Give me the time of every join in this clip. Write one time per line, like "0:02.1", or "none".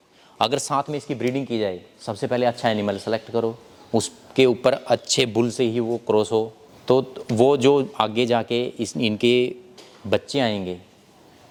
none